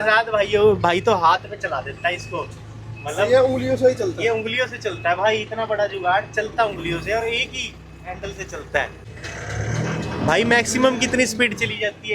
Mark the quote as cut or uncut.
cut